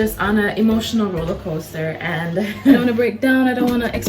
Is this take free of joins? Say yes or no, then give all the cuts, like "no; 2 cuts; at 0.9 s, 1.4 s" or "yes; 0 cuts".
no; 1 cut; at 2.8 s